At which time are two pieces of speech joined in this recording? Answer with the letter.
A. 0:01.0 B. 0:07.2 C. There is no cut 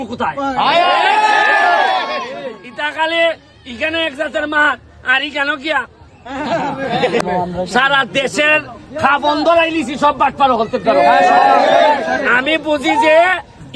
B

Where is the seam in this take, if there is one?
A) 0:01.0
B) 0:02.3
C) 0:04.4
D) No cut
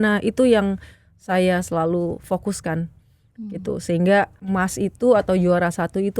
C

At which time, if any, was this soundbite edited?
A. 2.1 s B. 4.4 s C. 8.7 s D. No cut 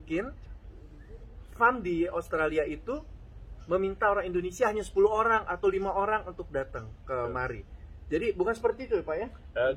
D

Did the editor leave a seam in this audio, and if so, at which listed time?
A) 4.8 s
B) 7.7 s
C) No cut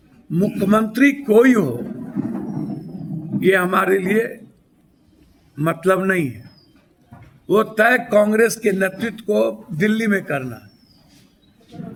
C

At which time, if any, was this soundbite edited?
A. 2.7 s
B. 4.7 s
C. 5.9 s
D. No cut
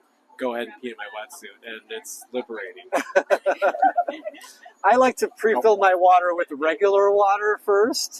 D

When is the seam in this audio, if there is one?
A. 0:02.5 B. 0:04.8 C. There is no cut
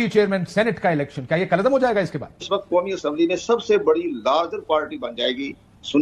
A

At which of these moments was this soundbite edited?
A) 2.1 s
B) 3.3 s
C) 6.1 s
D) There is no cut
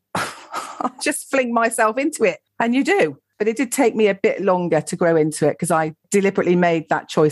B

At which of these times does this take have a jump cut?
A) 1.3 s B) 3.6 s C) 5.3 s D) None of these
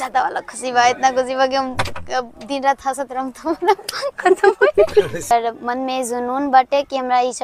C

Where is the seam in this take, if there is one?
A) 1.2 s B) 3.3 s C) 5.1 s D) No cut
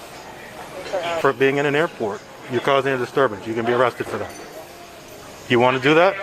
A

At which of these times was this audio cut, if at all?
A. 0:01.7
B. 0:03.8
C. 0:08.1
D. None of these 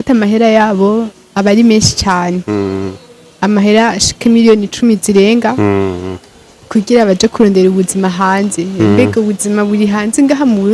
D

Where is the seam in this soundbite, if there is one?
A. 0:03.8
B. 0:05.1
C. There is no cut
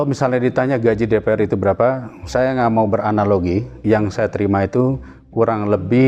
A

